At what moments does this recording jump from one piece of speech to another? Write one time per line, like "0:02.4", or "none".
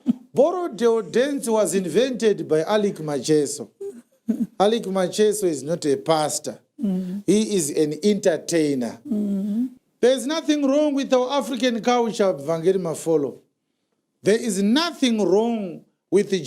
0:09.7